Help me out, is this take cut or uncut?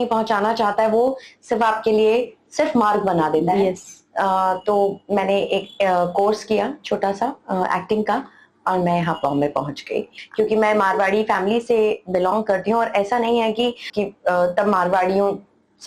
cut